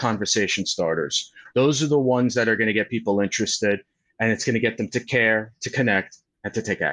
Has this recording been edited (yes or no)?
no